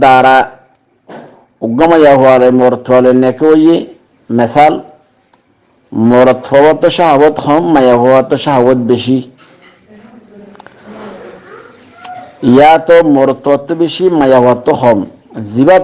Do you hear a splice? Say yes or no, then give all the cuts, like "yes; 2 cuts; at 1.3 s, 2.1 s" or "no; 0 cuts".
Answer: no; 0 cuts